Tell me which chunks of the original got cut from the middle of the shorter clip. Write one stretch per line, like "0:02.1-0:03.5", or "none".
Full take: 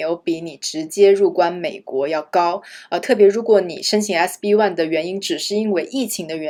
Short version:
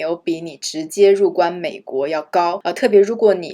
0:02.6-0:02.9

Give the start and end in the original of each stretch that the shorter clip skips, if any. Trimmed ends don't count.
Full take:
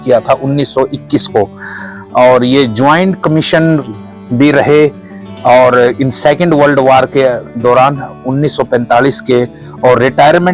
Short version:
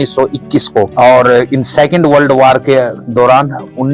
0:01.5-0:05.4

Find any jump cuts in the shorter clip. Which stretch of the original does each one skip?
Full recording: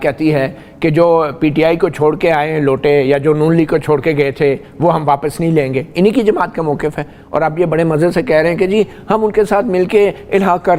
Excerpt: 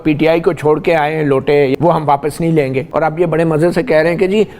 0:03.1-0:04.7
0:05.8-0:07.2

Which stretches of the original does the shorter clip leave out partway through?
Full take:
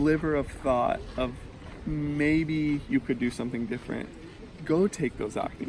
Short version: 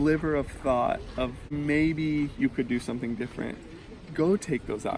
0:01.5-0:02.0

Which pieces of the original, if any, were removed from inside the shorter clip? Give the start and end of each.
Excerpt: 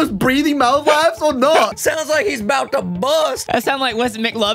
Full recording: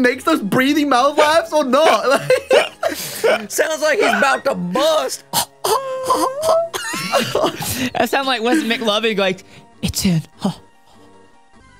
0:02.0-0:03.4
0:05.2-0:07.9

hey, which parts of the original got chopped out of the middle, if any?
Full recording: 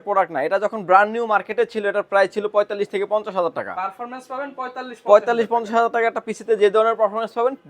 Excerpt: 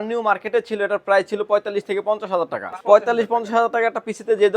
0:03.8-0:04.9

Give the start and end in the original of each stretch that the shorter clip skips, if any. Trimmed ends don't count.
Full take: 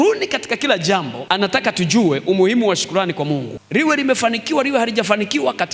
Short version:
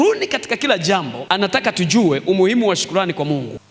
none

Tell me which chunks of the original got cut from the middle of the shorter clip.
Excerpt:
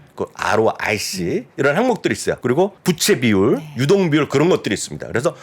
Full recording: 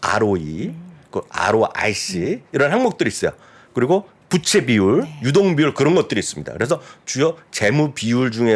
0:03.6-0:04.1

